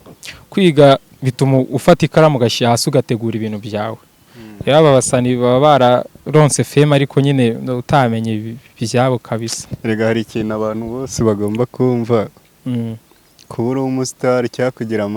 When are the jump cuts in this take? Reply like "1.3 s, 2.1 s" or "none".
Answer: none